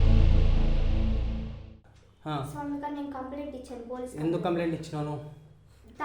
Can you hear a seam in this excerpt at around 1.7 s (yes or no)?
yes